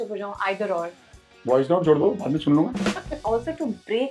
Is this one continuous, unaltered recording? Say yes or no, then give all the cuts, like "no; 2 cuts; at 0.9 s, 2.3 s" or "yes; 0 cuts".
no; 1 cut; at 3.2 s